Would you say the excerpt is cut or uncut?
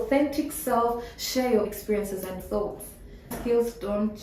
cut